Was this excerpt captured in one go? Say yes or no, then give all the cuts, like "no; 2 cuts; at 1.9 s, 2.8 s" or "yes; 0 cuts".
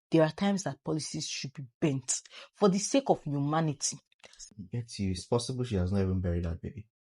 no; 1 cut; at 4.5 s